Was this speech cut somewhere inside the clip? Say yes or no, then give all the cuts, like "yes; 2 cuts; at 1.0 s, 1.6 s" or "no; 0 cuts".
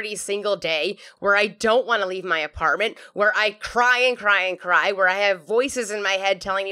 yes; 1 cut; at 1.1 s